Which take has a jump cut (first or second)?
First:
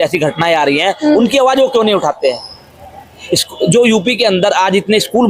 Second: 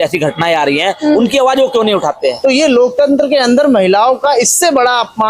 second